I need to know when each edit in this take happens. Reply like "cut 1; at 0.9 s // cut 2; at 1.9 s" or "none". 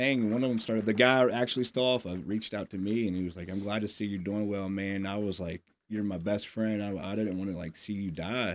none